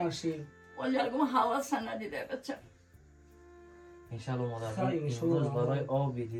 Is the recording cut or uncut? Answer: uncut